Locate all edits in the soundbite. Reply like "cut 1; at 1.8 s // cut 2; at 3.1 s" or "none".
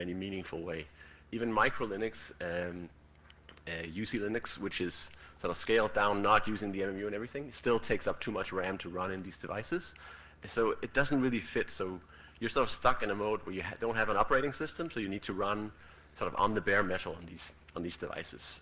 cut 1; at 3.3 s